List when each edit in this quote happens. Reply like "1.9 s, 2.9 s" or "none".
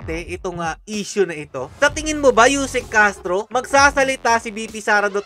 none